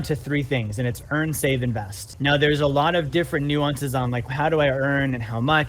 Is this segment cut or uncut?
cut